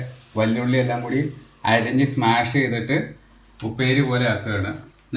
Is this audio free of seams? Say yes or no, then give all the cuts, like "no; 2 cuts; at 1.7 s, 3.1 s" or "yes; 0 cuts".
yes; 0 cuts